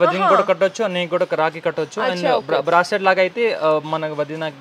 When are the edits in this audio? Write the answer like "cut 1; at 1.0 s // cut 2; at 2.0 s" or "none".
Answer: none

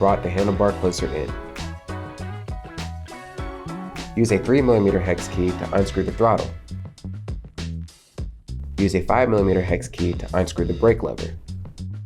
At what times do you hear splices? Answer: cut 1; at 1.3 s // cut 2; at 4.1 s // cut 3; at 6.5 s // cut 4; at 8.2 s // cut 5; at 11.2 s

